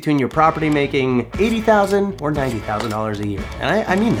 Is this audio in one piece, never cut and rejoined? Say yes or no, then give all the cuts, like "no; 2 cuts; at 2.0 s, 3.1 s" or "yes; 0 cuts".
yes; 0 cuts